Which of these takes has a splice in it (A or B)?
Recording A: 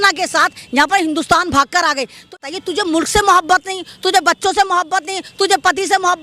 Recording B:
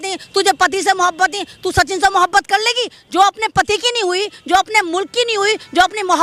A